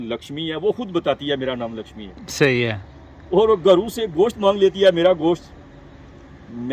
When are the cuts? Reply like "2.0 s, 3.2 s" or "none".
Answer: none